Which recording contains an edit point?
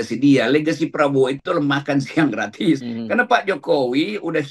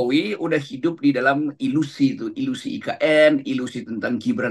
first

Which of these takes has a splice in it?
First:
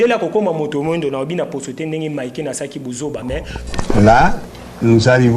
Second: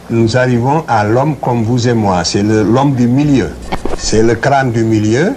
first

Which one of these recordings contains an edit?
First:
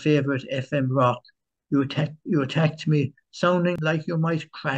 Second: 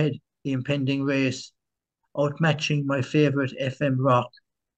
first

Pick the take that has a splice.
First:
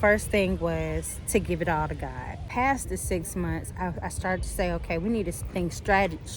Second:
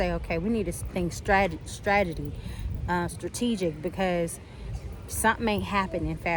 first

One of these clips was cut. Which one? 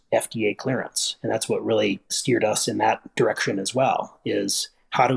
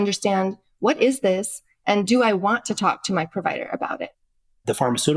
second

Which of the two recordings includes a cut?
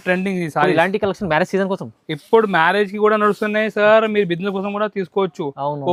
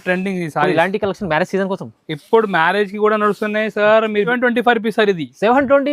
second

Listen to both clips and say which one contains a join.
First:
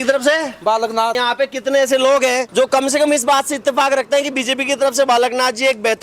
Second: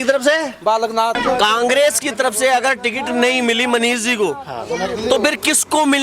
second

